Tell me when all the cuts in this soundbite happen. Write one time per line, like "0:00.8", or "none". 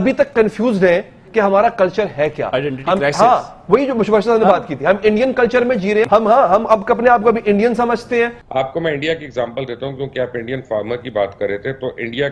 0:06.1
0:08.4